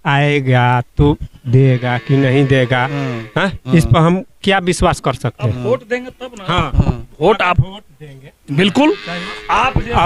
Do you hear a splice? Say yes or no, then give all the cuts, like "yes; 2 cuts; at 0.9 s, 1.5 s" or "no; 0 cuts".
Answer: no; 0 cuts